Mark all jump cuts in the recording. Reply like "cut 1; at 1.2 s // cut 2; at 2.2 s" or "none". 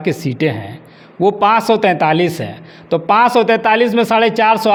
none